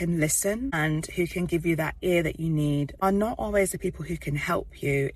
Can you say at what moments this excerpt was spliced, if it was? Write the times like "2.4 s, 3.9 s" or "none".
0.7 s, 2.9 s